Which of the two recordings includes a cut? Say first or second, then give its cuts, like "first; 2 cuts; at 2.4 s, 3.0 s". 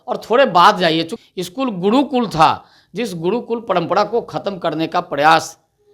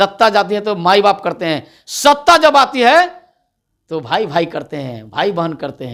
first; 1 cut; at 1.1 s